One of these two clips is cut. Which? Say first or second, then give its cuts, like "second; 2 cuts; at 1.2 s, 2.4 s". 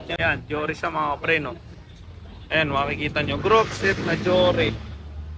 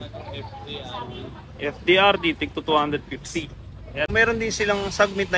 second; 1 cut; at 4.1 s